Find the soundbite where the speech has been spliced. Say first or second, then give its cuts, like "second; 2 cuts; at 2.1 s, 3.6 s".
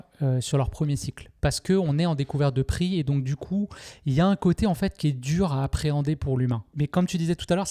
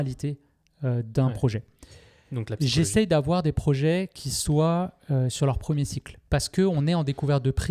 first; 1 cut; at 6.7 s